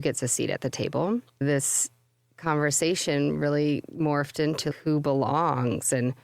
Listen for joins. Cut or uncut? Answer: cut